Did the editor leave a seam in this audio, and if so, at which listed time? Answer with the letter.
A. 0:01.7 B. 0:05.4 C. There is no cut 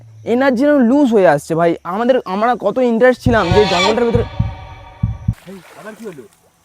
B